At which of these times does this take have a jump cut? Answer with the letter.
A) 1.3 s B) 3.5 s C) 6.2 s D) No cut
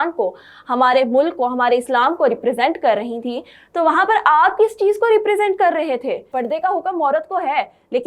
C